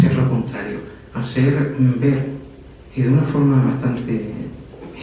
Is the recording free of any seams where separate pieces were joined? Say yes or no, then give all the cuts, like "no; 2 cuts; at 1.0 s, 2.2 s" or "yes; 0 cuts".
yes; 0 cuts